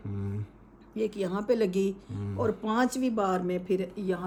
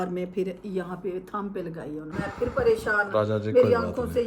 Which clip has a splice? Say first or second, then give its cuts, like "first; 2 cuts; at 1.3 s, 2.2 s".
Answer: second; 1 cut; at 2.1 s